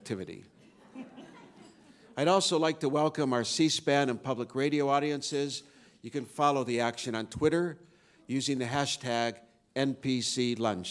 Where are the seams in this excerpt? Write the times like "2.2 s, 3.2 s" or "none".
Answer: 4.2 s